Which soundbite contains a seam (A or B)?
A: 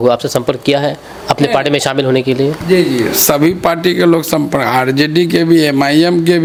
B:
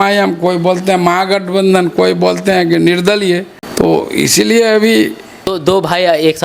B